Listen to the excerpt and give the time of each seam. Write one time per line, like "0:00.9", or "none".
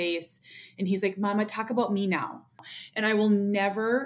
0:02.6